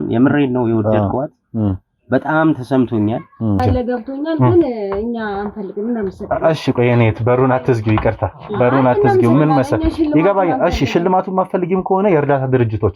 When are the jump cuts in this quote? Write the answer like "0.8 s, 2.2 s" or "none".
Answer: 3.6 s